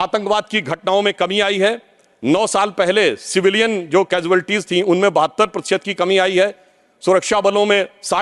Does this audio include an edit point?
no; 0 cuts

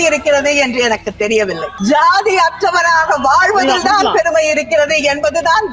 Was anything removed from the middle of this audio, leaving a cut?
yes; 1 cut; at 1.7 s

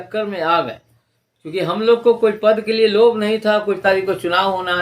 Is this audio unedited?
no; 1 cut; at 3.8 s

